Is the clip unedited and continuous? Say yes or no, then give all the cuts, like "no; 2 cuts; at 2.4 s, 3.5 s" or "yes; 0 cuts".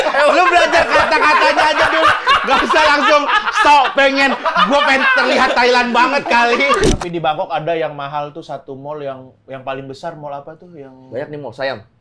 no; 1 cut; at 6.9 s